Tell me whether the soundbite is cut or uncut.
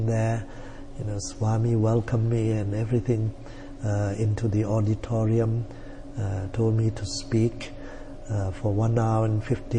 uncut